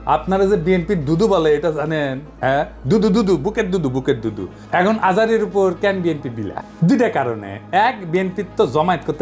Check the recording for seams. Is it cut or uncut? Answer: cut